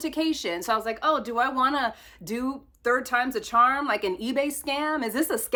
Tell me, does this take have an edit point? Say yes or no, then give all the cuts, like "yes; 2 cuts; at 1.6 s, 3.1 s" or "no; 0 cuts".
no; 0 cuts